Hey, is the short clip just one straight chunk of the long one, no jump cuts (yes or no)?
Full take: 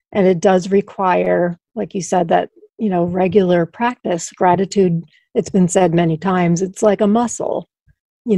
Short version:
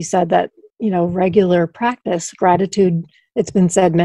yes